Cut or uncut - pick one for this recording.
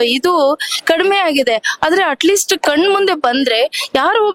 uncut